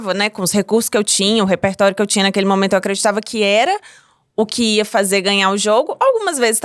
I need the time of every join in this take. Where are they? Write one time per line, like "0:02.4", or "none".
none